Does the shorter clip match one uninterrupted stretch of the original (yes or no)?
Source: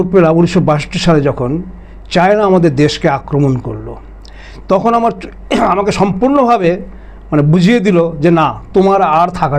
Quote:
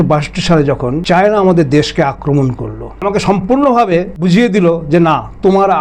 no